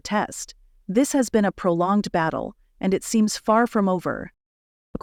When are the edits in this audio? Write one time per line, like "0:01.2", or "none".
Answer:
none